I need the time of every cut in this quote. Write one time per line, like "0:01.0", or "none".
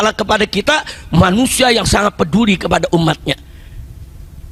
none